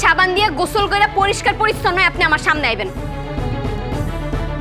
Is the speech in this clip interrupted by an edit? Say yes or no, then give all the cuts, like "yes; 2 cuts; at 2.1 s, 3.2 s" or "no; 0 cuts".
no; 0 cuts